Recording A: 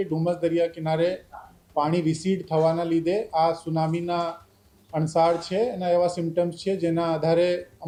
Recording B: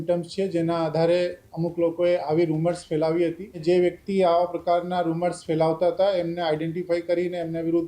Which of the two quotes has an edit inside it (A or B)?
B